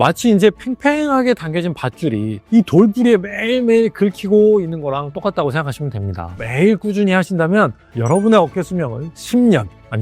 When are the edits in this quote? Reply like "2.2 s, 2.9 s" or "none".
6.4 s